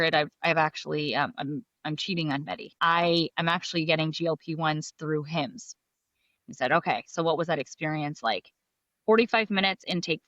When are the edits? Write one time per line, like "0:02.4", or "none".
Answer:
0:02.7

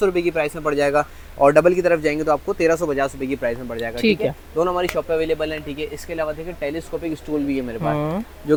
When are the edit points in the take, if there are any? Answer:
none

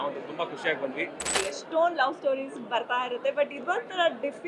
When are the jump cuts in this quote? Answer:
0:01.4

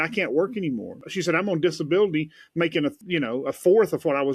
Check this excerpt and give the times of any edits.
0:01.0
0:03.0

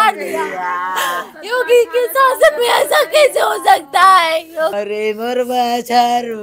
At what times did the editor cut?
0:04.7

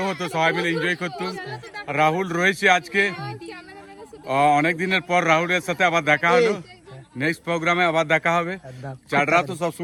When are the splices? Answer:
none

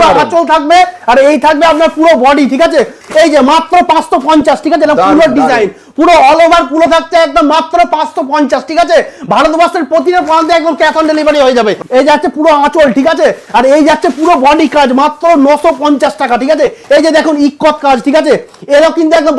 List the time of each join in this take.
0:03.0
0:11.8
0:16.8

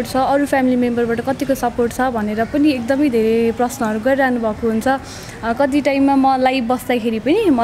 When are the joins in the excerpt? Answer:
none

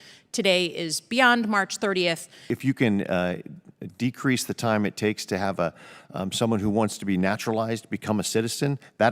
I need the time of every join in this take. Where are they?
0:02.5

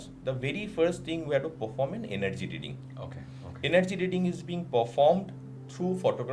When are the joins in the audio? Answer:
none

